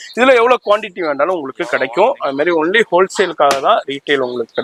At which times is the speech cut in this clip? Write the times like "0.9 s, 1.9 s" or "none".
none